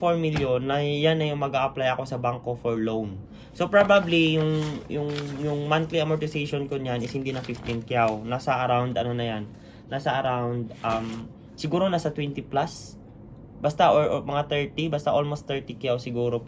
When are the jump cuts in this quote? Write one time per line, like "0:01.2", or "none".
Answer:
none